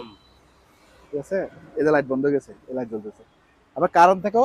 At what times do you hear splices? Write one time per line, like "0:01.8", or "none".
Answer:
none